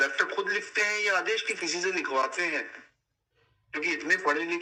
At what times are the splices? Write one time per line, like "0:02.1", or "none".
none